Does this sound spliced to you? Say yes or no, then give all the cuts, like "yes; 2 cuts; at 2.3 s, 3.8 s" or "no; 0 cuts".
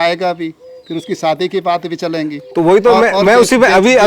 no; 0 cuts